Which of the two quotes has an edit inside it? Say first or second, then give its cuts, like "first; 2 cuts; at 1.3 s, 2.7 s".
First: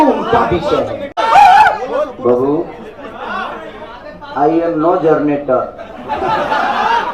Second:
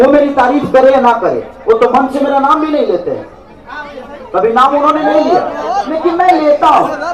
first; 1 cut; at 1.1 s